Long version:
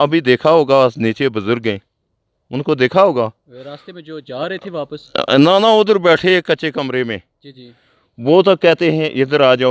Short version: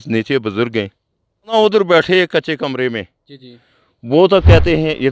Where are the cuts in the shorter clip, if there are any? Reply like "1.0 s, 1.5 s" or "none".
1.5 s